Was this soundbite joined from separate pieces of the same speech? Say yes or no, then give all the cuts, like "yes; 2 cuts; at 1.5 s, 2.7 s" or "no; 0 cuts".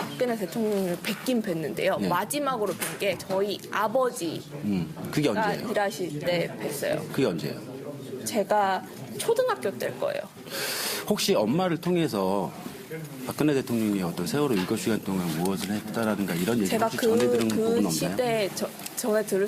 yes; 1 cut; at 7.8 s